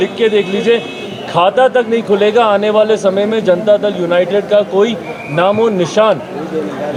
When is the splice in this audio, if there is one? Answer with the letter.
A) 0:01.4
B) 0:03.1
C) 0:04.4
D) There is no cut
D